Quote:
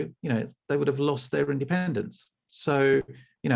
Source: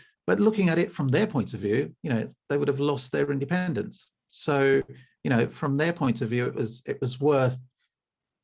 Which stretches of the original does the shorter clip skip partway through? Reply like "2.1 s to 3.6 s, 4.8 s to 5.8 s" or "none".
none

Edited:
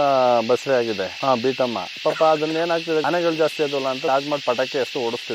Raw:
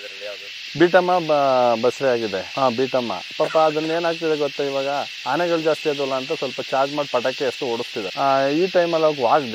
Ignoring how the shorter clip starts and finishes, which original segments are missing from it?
4.4 s to 5.3 s, 6.3 s to 6.7 s

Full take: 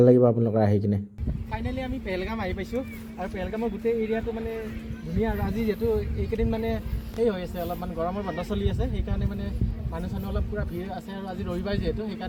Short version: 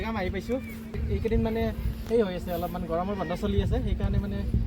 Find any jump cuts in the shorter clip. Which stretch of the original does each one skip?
3.2 s to 6.0 s

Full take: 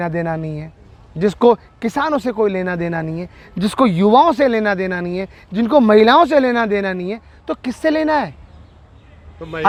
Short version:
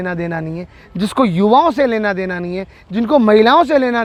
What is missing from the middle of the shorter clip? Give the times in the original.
none

